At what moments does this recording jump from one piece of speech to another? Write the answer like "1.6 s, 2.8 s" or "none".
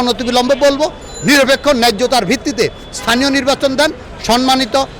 none